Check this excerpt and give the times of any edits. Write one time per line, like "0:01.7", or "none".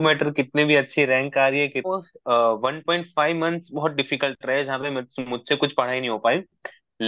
0:01.9